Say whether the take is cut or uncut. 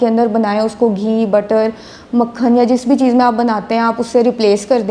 uncut